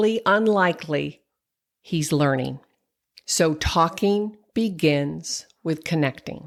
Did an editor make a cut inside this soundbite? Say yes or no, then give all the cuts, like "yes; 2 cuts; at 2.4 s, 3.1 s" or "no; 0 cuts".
no; 0 cuts